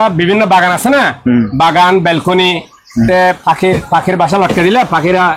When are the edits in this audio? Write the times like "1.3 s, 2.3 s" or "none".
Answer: none